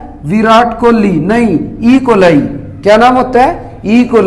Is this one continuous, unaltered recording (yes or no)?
yes